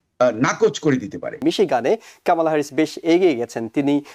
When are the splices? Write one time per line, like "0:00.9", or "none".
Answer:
0:01.4